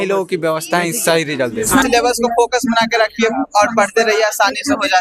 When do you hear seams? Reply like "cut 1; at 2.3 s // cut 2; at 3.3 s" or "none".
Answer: cut 1; at 1.8 s